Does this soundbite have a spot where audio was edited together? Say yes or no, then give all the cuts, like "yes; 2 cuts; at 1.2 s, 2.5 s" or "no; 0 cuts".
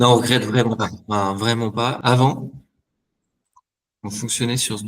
yes; 1 cut; at 2.0 s